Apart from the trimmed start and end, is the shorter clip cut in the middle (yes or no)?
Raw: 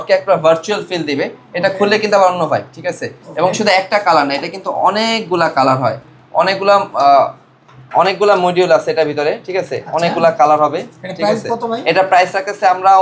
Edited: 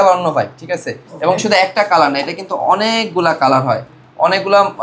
no